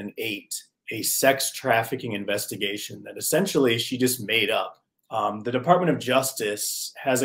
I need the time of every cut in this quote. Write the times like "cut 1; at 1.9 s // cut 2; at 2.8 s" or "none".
cut 1; at 5.1 s